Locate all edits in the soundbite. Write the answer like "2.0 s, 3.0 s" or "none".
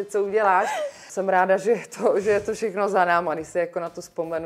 1.0 s